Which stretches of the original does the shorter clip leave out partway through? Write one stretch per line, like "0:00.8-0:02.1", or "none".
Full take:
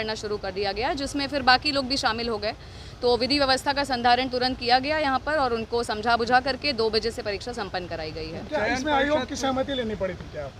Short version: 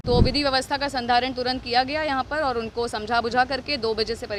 none